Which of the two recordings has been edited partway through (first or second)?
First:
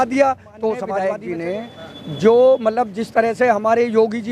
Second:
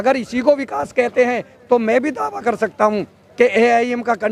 first